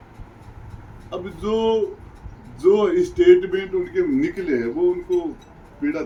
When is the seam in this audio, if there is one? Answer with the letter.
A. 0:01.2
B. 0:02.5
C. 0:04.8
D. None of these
D